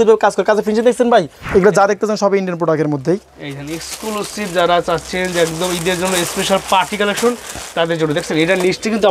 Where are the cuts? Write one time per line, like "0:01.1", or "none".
0:01.4

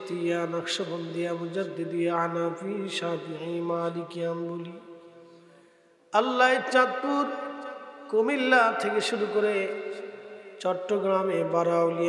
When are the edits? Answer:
none

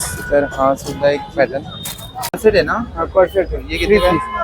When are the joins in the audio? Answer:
0:02.2

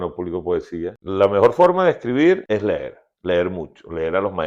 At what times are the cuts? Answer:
0:01.0
0:02.4

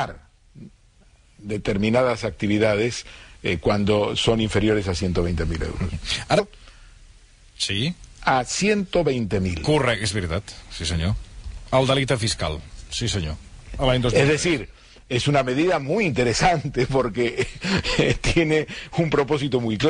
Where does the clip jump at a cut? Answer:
none

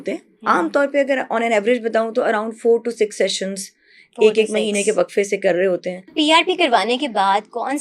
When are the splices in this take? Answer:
0:06.1

